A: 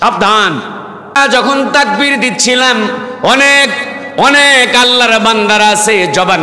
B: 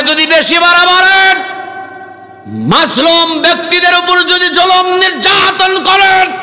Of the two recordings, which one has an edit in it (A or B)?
A